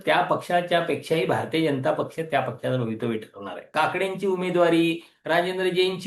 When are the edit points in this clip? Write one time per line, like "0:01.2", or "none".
0:03.7